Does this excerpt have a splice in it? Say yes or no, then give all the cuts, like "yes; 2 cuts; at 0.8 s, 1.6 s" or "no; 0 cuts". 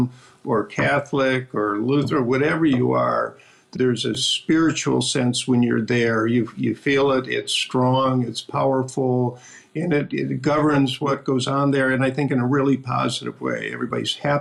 no; 0 cuts